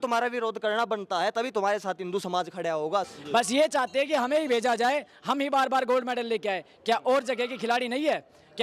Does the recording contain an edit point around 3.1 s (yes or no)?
yes